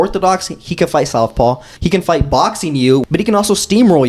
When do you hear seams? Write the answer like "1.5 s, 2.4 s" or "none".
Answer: 1.7 s, 3.0 s